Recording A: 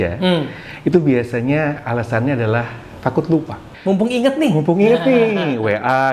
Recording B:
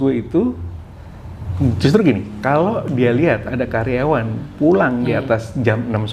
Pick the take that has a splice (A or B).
A